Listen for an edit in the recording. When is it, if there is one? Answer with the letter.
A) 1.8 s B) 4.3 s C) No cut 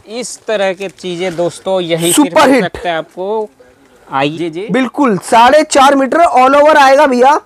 B